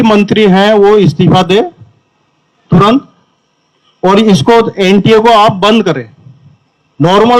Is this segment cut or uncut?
uncut